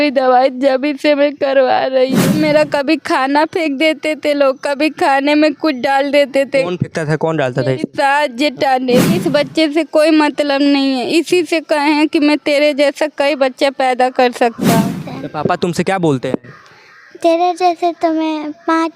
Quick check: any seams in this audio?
yes; 3 cuts; at 2.3 s, 9.1 s, 14.9 s

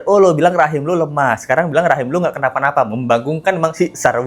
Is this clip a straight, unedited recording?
yes; 0 cuts

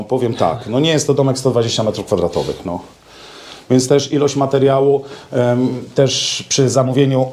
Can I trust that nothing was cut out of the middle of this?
yes; 0 cuts

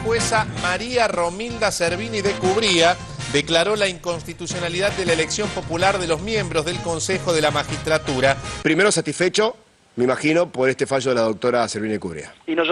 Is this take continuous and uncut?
no; 1 cut; at 8.5 s

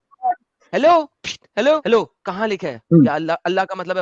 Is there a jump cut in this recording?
yes; 1 cut; at 1.8 s

